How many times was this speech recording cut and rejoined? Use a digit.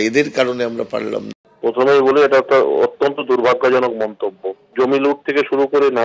1